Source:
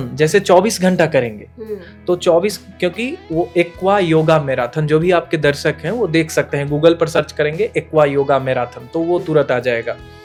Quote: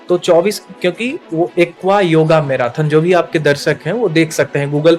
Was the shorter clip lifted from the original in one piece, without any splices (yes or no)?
yes